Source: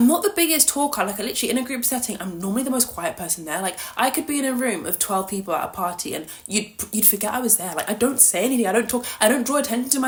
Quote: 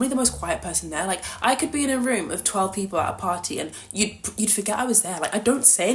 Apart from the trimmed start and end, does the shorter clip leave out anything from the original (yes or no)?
no